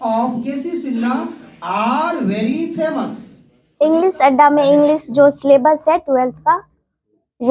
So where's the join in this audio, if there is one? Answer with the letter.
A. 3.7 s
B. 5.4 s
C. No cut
A